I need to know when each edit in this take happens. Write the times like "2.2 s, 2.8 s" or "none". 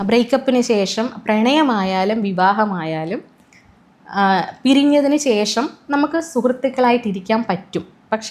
none